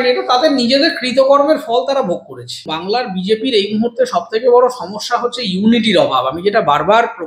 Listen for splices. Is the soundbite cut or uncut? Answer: cut